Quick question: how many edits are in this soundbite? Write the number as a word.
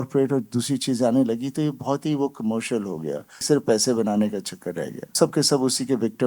two